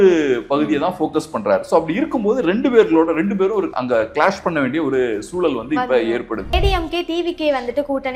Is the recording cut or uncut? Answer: cut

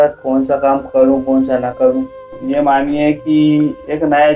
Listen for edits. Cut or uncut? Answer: cut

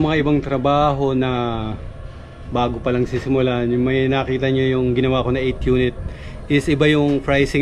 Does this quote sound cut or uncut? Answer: uncut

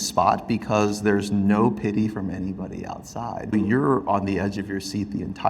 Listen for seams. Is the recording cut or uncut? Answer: cut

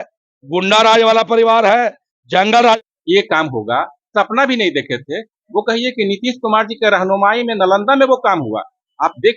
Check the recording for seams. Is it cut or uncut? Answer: cut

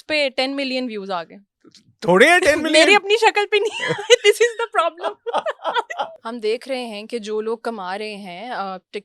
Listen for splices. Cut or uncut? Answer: cut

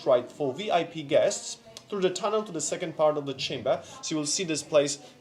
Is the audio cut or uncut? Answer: uncut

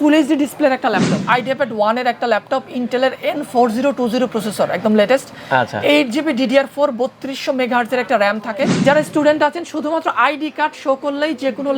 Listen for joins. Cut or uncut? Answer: cut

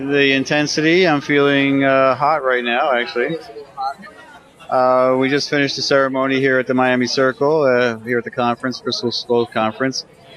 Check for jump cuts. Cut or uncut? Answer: cut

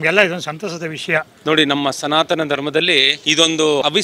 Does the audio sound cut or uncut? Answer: uncut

